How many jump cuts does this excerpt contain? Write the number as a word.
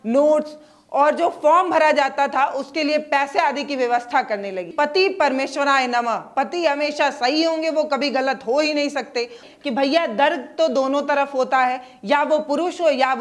two